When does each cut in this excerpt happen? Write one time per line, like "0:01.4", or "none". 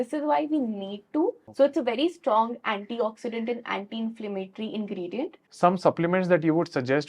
0:01.4
0:05.4